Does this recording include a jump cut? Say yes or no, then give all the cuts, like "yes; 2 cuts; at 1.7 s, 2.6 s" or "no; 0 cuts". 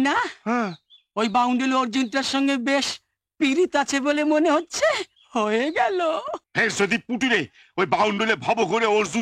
yes; 1 cut; at 6.4 s